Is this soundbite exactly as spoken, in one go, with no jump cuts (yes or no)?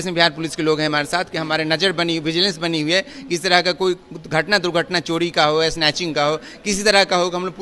yes